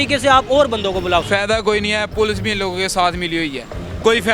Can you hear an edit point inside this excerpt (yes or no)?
yes